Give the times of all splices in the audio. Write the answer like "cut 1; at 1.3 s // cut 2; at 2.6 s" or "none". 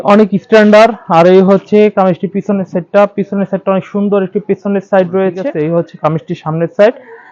cut 1; at 5.5 s